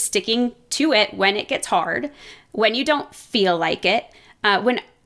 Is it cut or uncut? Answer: uncut